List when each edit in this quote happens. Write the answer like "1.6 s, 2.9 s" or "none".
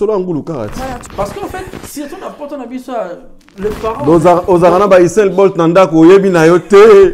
1.0 s